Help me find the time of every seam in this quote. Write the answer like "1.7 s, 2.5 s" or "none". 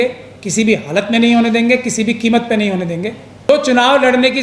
3.5 s